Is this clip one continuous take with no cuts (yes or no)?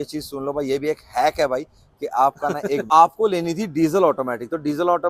no